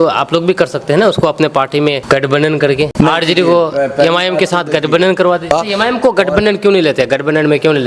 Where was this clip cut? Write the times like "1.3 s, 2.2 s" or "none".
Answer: 2.0 s, 2.9 s, 5.5 s